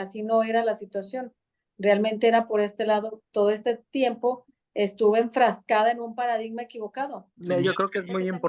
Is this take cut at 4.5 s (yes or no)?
no